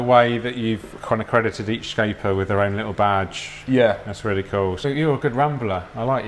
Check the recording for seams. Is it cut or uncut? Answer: cut